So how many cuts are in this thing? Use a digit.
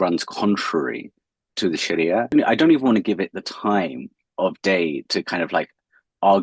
1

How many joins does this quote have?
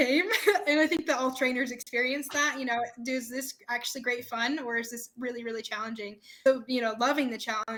0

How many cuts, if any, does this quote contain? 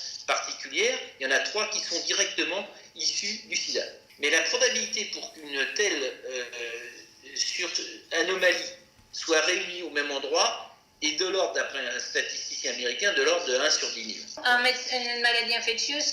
2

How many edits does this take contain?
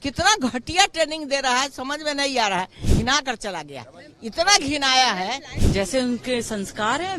2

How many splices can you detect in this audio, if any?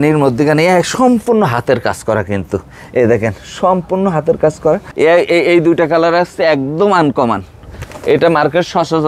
1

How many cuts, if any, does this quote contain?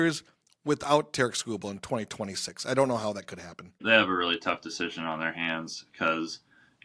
1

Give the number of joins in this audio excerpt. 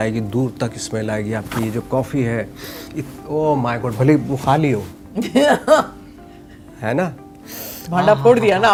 0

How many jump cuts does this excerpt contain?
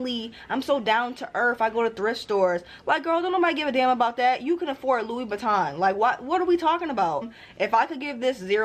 1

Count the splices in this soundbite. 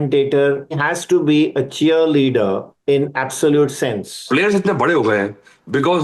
3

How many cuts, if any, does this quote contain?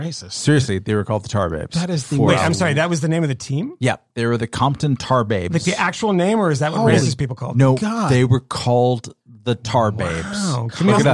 0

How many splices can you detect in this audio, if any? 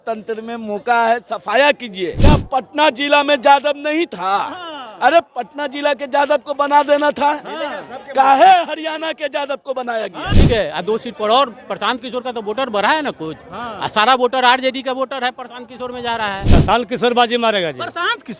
3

